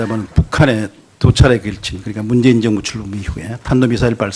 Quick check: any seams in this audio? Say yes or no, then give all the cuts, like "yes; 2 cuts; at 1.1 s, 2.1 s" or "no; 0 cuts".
yes; 1 cut; at 2.6 s